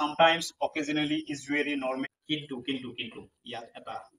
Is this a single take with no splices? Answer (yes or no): no